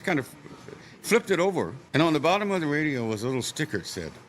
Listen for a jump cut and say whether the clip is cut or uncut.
cut